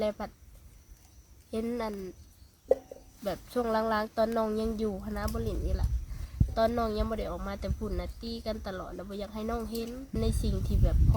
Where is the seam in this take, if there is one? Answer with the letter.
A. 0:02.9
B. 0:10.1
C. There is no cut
B